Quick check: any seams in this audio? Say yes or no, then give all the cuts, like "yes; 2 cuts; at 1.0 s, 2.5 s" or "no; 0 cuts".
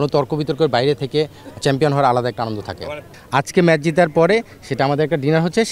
yes; 1 cut; at 3.1 s